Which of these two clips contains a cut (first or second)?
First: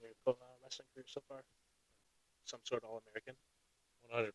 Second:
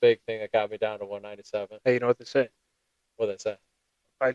first